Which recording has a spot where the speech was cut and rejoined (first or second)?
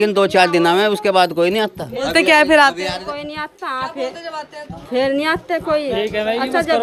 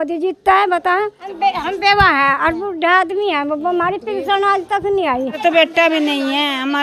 second